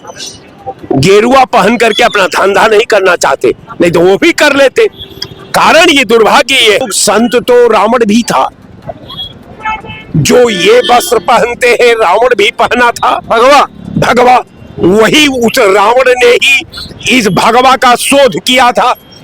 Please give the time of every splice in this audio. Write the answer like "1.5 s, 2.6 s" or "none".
6.9 s